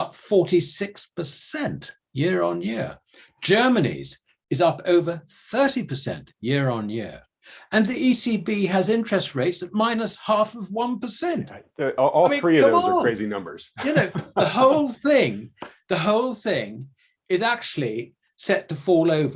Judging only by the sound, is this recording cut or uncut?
uncut